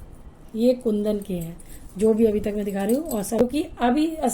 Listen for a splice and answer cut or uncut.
cut